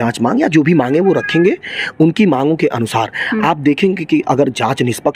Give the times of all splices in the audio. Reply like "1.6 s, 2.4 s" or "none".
none